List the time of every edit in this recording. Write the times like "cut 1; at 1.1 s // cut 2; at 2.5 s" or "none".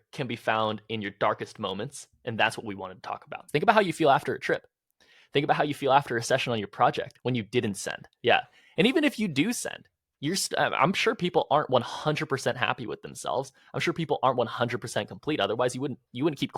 cut 1; at 3.4 s